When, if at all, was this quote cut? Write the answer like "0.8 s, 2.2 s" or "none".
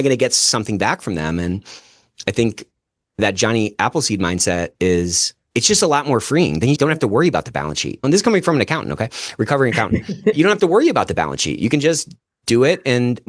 8.0 s, 10.3 s